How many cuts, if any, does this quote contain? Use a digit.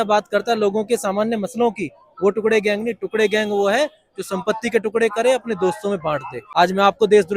1